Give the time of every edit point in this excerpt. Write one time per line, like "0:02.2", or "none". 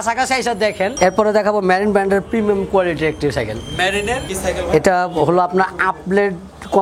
0:00.9
0:04.3